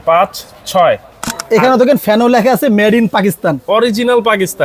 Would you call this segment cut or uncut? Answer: cut